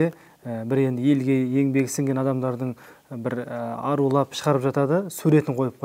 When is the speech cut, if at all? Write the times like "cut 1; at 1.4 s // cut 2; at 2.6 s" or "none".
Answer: none